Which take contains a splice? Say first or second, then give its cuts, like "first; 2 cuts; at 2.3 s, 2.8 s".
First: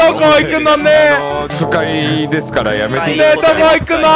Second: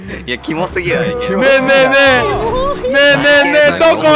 first; 1 cut; at 1.5 s